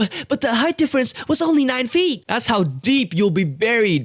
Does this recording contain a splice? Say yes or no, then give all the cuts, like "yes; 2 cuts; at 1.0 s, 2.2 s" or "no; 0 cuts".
yes; 1 cut; at 2.2 s